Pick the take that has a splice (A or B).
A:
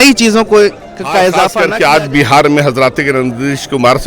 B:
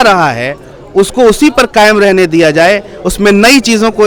A